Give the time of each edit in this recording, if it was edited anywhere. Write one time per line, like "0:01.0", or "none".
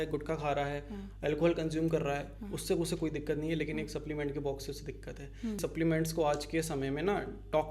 0:05.6